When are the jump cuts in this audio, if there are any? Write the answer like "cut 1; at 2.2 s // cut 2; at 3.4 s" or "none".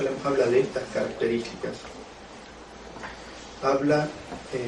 none